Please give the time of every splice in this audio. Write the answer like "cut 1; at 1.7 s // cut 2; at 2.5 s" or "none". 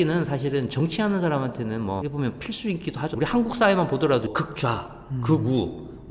cut 1; at 3.1 s